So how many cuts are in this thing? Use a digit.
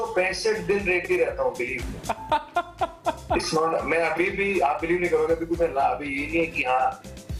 0